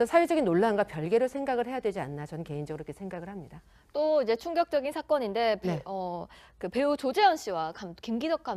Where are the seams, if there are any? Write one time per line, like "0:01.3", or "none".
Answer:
0:01.4